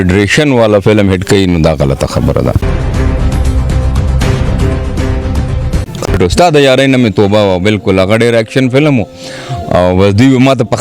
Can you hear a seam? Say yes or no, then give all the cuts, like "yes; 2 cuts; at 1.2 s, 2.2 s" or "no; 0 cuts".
yes; 2 cuts; at 2.6 s, 6.1 s